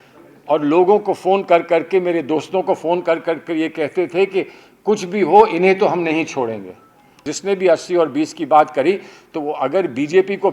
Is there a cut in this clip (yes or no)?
yes